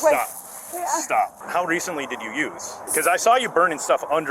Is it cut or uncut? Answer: cut